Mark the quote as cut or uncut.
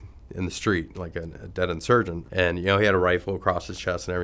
cut